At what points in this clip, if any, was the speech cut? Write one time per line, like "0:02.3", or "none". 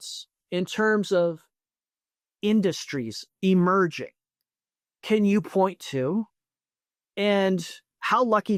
none